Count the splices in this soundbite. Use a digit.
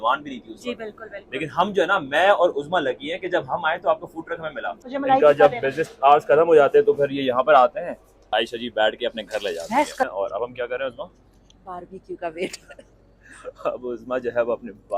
3